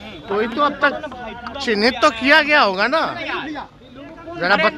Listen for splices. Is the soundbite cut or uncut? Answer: uncut